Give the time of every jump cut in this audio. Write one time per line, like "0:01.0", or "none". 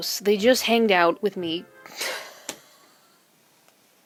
none